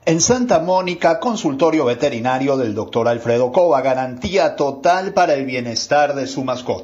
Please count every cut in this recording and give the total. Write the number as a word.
zero